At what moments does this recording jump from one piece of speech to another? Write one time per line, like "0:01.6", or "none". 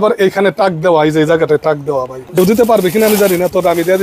0:01.6